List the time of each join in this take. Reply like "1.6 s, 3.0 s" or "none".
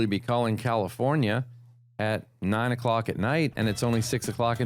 none